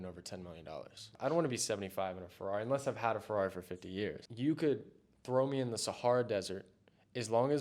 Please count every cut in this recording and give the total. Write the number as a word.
two